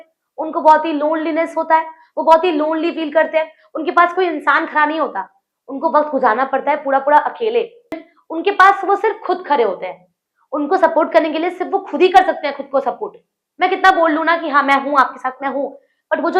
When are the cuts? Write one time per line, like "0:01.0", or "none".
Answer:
0:08.0